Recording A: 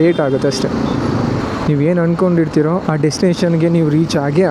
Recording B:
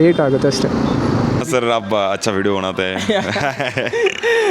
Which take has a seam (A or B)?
B